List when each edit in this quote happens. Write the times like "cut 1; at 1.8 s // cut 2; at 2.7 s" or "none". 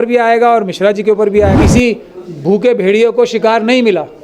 cut 1; at 1.6 s